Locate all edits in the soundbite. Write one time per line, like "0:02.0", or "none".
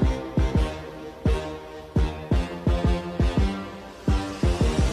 none